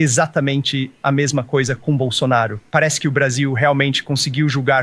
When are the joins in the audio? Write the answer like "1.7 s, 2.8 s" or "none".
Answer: 2.7 s